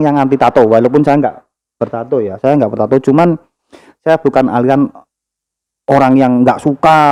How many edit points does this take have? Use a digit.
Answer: 0